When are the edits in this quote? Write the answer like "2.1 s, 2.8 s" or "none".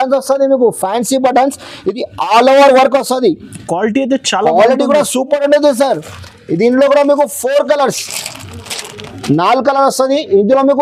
none